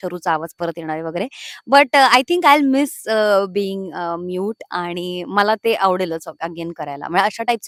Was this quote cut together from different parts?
no; 0 cuts

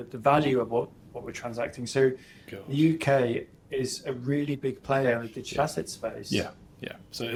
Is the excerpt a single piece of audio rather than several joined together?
yes; 0 cuts

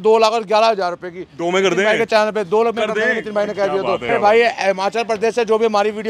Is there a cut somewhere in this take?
yes; 1 cut; at 4.1 s

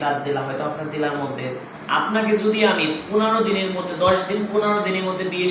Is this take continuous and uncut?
no; 1 cut; at 1.7 s

